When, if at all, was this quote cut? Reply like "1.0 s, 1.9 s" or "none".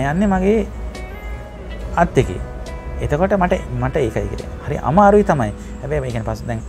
none